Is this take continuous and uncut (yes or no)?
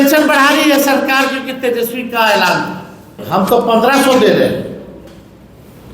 no